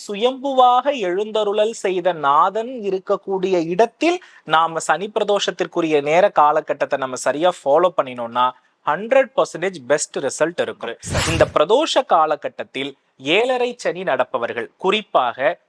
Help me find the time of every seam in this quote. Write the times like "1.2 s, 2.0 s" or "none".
10.9 s